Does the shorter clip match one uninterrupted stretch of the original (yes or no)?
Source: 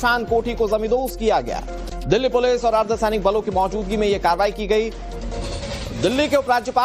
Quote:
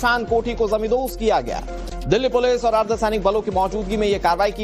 yes